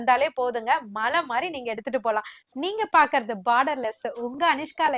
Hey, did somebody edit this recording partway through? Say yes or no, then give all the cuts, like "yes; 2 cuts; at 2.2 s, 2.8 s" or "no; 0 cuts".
yes; 1 cut; at 2.5 s